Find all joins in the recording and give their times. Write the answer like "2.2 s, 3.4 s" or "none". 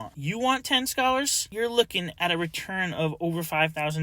1.5 s